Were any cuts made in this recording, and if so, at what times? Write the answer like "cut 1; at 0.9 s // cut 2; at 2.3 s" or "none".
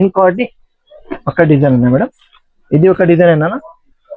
none